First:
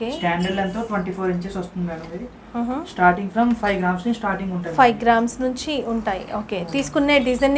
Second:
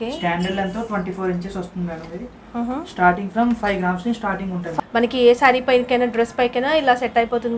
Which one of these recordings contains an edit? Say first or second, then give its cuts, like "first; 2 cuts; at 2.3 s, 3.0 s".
second; 1 cut; at 4.7 s